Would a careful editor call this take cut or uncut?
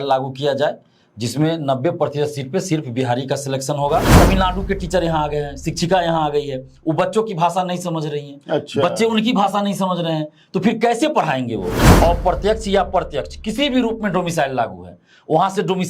cut